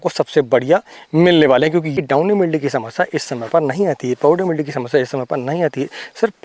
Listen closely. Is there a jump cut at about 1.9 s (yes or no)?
yes